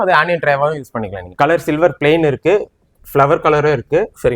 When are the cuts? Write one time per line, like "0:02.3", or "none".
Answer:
0:01.3